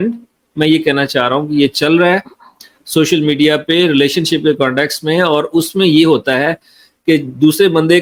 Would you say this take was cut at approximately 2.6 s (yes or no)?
no